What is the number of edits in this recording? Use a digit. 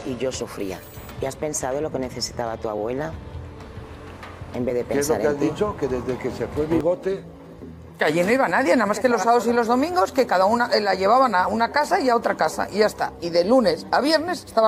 0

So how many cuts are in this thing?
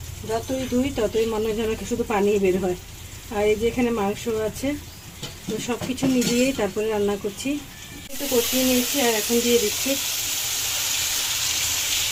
0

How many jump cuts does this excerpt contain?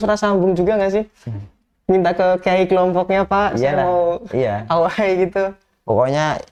0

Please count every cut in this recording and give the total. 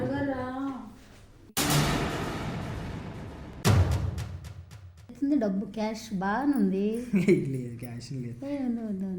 1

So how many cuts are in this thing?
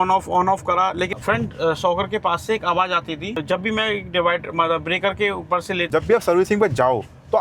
3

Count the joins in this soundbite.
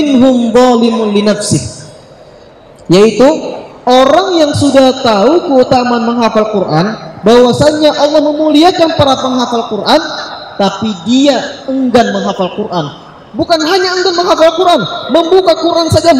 0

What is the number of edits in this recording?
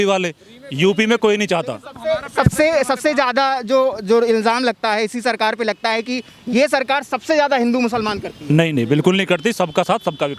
0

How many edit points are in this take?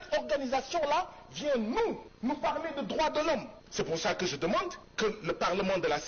3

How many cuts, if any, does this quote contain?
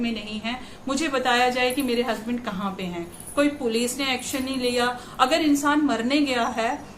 0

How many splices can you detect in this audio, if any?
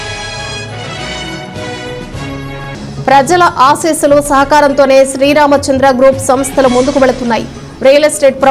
1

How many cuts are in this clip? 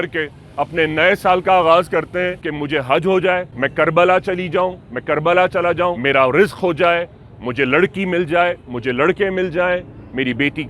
3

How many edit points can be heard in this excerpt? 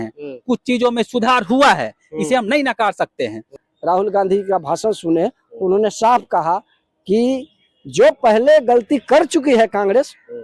1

